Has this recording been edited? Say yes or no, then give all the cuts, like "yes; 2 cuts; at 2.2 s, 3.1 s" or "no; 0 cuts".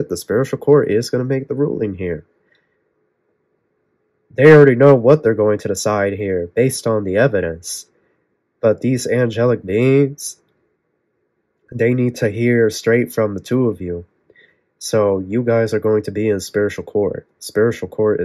no; 0 cuts